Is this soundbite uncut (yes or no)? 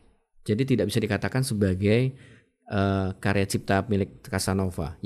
yes